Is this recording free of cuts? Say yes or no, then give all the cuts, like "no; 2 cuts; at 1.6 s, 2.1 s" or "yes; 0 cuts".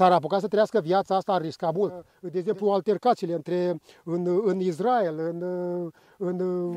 no; 1 cut; at 2.2 s